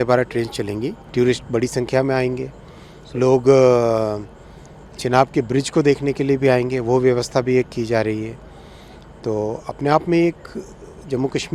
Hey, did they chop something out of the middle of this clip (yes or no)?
yes